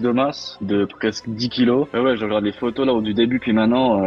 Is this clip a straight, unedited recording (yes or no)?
no